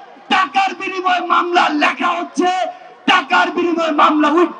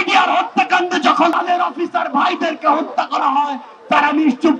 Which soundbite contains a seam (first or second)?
second